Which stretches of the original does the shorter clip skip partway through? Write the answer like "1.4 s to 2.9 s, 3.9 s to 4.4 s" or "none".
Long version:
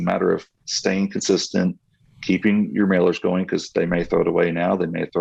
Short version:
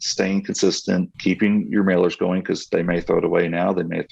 1.8 s to 2.2 s